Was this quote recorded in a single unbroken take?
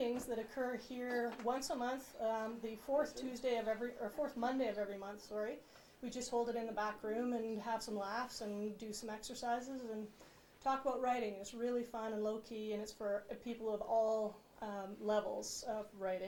yes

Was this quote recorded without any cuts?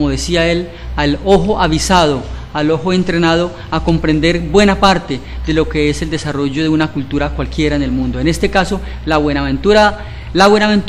yes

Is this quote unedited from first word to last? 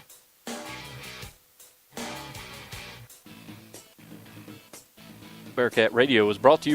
no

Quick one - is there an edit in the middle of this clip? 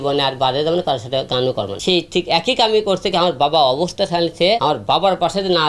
yes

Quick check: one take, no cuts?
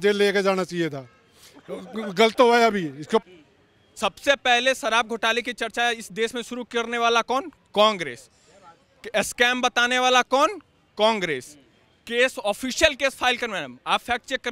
yes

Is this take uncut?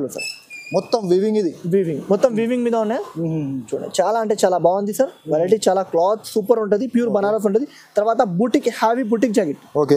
yes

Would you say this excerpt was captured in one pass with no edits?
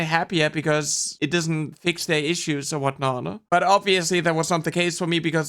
no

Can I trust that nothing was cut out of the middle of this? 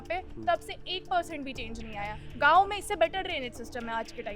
no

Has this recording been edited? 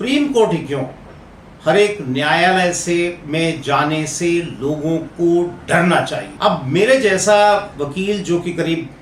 yes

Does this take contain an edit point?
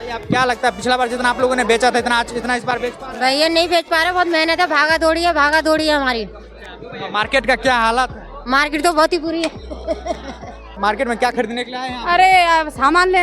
yes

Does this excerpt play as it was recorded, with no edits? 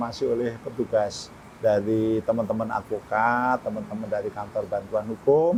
yes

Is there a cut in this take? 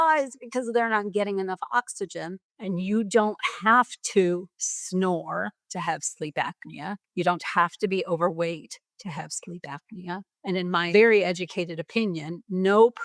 yes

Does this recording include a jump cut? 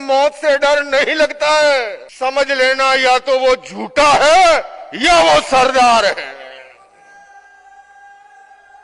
yes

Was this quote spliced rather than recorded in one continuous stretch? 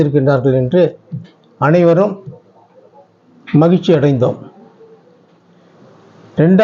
no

